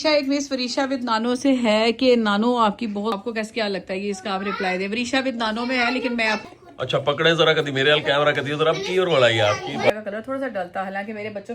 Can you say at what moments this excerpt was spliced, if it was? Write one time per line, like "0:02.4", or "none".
0:03.1
0:06.4
0:09.9